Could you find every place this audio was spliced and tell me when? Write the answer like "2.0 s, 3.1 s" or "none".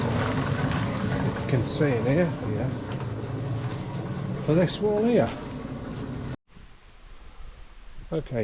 6.4 s